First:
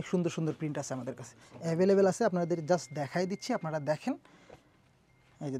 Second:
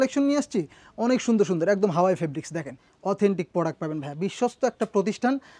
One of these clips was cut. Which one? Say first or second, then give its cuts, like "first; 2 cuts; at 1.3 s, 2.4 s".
second; 1 cut; at 2.9 s